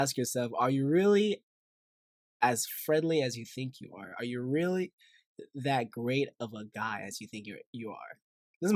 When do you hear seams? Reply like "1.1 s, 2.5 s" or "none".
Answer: none